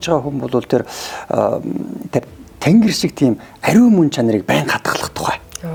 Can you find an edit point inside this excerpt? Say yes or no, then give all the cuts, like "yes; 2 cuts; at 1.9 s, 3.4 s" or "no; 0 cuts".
no; 0 cuts